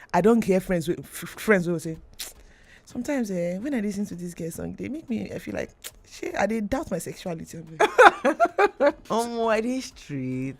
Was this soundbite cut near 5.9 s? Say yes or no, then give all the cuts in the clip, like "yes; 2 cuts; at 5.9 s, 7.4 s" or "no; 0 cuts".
no; 1 cut; at 9.0 s